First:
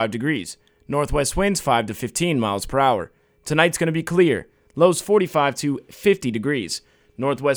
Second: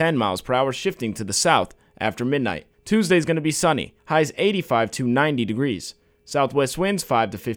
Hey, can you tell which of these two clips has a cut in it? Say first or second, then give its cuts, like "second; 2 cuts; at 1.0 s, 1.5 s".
second; 2 cuts; at 2.7 s, 3.9 s